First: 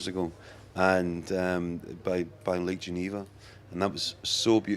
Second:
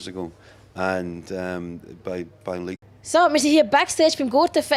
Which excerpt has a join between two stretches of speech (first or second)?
first